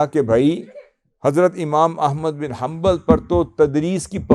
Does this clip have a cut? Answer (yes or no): no